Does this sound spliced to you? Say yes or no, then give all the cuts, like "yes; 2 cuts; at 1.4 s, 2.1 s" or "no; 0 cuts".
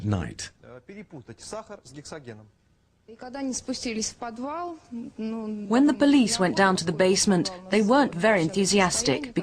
yes; 1 cut; at 5.5 s